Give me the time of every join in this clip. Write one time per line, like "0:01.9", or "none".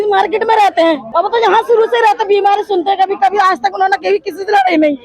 0:01.0

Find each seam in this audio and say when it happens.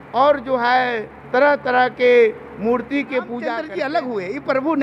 0:03.6

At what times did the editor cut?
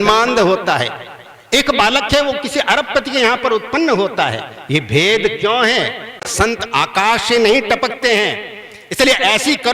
0:06.2

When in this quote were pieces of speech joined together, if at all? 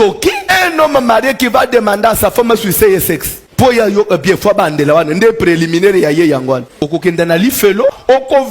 none

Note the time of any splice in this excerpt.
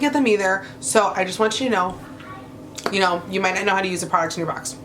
none

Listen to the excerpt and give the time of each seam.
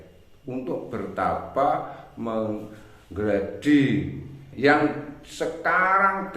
0:04.4

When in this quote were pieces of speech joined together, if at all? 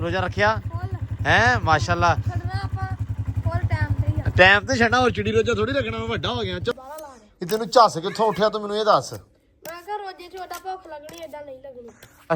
0:06.7

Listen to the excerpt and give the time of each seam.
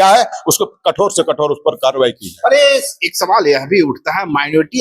none

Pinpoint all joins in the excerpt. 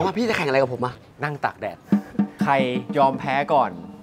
0:01.1
0:02.8

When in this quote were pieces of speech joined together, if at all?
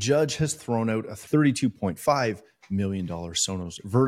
0:01.1

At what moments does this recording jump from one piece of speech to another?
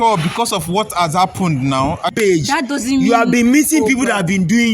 0:02.1

